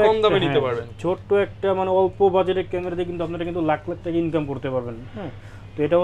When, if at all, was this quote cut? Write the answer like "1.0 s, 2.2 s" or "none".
none